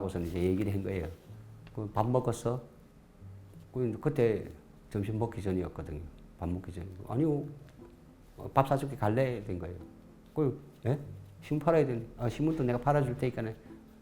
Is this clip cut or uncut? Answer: cut